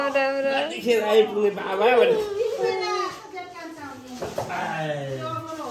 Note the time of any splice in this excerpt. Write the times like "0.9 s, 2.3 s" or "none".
none